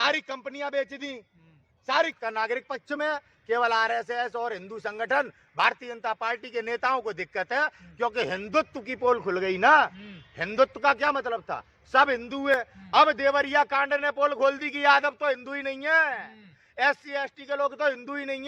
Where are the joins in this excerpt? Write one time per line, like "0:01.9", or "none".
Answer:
0:02.1